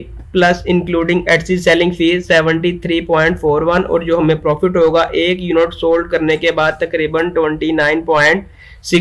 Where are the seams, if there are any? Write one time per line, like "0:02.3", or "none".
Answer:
none